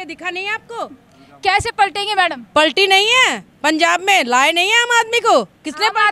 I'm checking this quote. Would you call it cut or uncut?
uncut